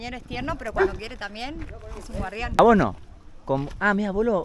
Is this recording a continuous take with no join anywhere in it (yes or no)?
no